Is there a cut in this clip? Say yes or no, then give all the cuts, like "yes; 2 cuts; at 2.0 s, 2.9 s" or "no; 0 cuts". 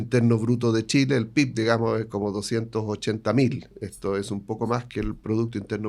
no; 0 cuts